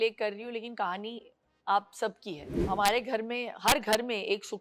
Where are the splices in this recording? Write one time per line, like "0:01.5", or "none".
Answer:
0:02.6